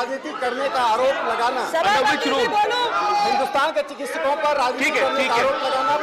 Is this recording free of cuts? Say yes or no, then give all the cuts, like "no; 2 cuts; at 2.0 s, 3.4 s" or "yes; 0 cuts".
yes; 0 cuts